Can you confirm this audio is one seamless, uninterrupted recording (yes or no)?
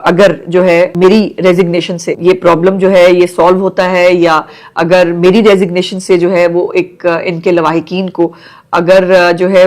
no